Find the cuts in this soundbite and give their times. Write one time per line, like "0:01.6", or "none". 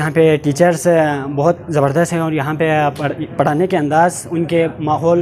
none